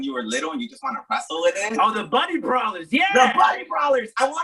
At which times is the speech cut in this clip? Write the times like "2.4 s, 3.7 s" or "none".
none